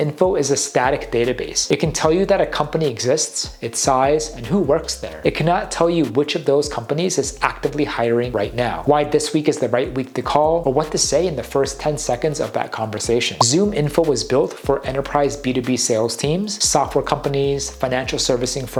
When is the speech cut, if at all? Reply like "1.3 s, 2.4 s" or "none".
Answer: none